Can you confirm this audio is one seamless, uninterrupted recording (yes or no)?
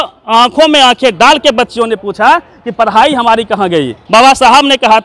no